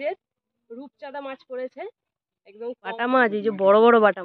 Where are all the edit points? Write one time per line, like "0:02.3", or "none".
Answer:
0:03.0